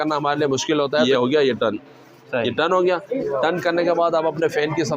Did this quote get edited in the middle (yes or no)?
yes